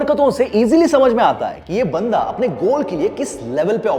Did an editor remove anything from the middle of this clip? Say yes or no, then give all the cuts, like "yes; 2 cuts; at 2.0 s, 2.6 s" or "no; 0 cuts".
no; 0 cuts